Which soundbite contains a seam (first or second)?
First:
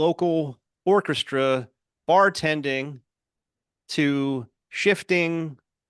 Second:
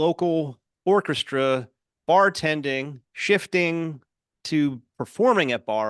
second